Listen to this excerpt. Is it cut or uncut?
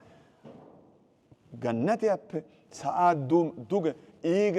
uncut